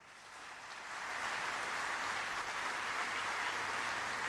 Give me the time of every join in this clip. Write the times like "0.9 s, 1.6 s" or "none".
none